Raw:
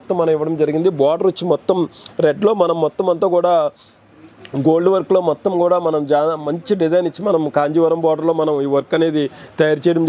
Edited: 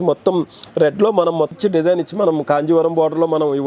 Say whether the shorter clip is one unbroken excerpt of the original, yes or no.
no